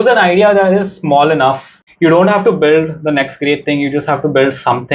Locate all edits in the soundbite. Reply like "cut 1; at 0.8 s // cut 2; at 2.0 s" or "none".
cut 1; at 1.7 s